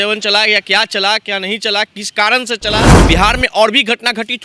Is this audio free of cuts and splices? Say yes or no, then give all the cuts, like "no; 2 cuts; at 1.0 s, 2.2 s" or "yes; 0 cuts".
no; 1 cut; at 2.9 s